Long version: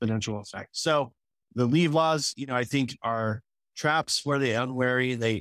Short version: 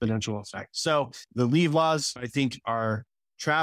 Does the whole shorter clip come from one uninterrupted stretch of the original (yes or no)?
no